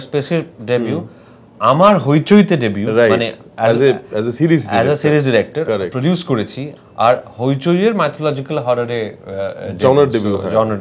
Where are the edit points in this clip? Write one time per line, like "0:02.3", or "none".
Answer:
0:06.7